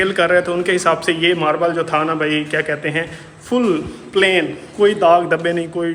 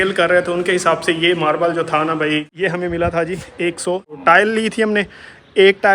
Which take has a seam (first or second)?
second